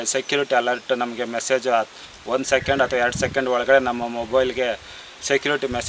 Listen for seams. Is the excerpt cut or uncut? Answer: uncut